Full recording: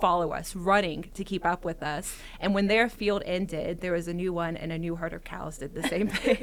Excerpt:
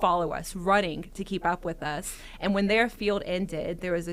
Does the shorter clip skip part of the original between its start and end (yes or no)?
no